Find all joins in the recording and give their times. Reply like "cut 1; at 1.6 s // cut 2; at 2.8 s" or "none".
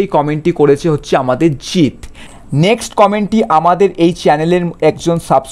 cut 1; at 2.2 s

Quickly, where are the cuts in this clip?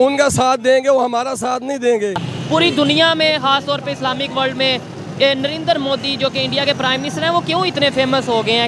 cut 1; at 2.3 s

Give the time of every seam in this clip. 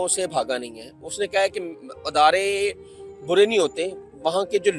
none

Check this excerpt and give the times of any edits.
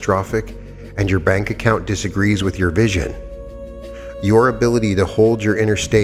none

